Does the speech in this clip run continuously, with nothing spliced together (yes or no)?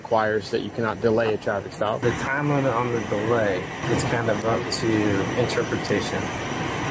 no